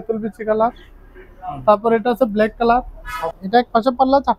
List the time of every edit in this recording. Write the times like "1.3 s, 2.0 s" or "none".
3.3 s